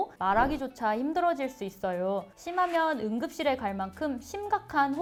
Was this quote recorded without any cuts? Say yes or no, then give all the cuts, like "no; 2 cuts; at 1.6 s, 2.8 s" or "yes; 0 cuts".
yes; 0 cuts